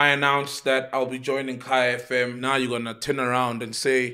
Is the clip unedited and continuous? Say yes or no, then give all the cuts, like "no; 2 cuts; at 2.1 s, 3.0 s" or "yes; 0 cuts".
no; 1 cut; at 2.4 s